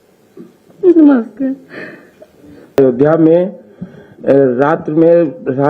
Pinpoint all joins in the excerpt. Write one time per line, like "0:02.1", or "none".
0:02.8